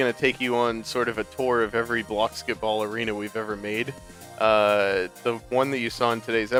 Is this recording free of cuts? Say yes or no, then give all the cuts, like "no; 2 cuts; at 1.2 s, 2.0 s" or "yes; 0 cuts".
yes; 0 cuts